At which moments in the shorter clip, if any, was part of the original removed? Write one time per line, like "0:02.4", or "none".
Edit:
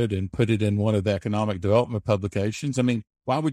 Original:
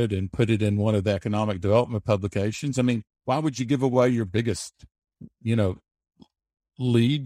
none